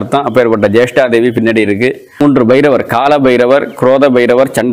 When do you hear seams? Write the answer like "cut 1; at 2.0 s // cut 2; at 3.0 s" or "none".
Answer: cut 1; at 2.2 s